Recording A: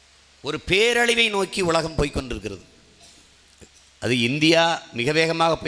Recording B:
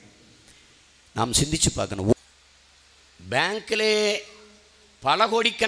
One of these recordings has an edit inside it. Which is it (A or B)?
B